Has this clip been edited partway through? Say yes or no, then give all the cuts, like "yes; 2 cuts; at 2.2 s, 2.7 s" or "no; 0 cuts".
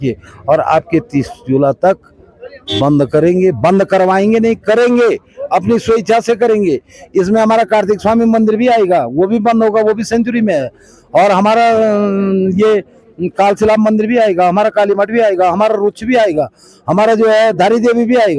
no; 0 cuts